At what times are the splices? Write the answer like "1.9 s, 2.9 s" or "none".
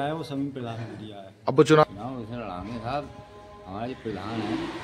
1.8 s

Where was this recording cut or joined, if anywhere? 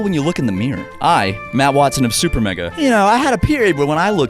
2.6 s

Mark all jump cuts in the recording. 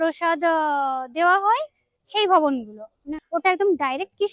3.1 s

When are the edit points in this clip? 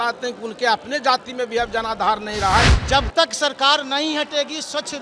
2.7 s

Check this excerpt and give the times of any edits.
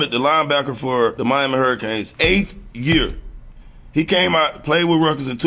1.3 s, 3.1 s

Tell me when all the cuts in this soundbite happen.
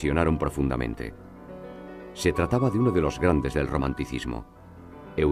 none

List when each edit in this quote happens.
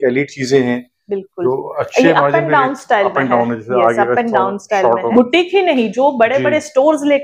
5.1 s

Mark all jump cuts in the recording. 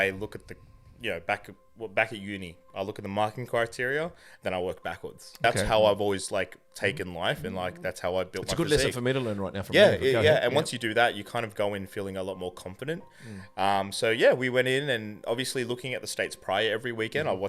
5.3 s

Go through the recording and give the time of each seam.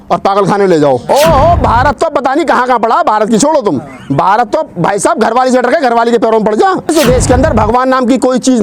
1.0 s, 6.9 s

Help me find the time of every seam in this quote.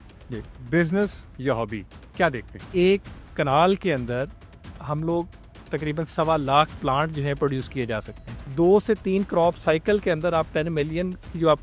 2.7 s, 8.4 s

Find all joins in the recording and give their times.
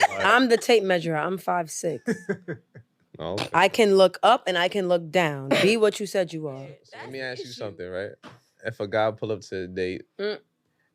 6.9 s

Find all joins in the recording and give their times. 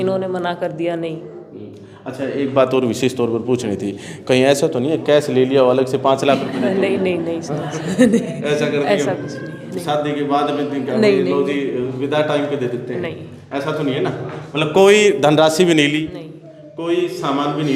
none

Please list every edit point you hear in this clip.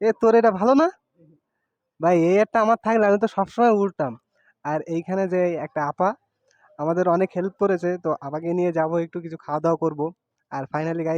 none

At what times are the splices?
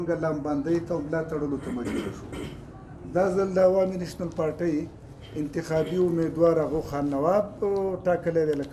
none

